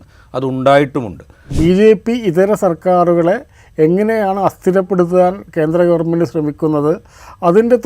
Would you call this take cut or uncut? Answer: cut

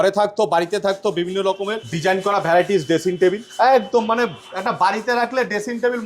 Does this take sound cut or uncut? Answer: cut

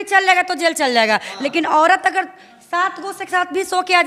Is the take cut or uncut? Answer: uncut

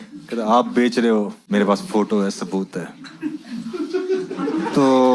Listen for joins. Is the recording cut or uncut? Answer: cut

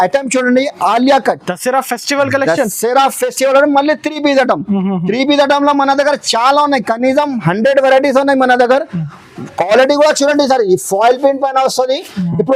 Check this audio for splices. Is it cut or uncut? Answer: uncut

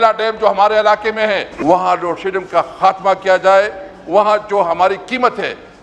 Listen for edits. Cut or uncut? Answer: cut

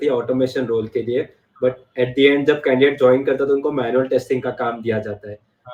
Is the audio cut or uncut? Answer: uncut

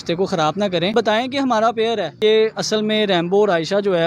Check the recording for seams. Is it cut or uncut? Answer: cut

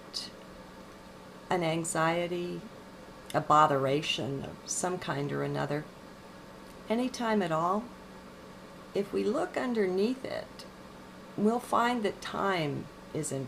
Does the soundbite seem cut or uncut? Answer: cut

